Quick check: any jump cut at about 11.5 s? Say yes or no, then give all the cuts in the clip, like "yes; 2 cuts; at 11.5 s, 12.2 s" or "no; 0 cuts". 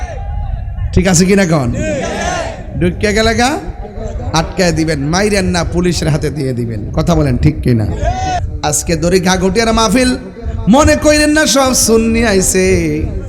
no; 1 cut; at 8.5 s